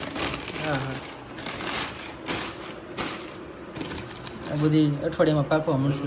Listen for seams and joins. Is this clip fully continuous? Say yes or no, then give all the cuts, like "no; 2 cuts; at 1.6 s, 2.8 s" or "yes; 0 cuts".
yes; 0 cuts